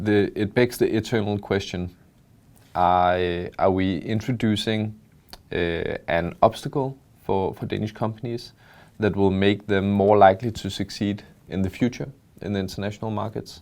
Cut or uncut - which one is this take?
uncut